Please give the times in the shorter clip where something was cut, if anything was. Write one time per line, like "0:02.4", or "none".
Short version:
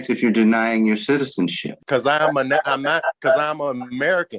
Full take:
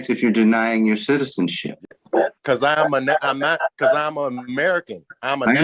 0:01.8